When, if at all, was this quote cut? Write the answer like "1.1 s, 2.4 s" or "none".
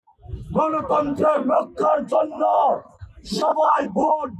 none